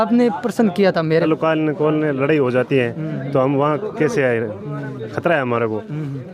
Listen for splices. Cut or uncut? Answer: cut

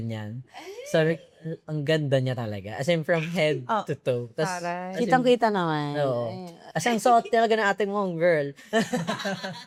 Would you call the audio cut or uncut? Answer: uncut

